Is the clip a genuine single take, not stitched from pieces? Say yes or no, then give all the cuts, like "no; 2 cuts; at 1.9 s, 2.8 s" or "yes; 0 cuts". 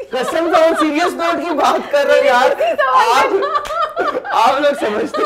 yes; 0 cuts